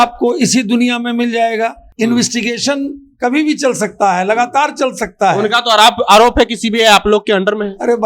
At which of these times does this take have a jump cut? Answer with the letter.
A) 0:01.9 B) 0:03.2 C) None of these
A